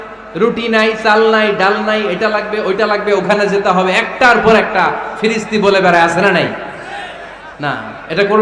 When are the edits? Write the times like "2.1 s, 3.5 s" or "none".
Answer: none